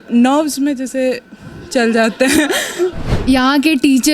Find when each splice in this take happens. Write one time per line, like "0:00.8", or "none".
0:03.1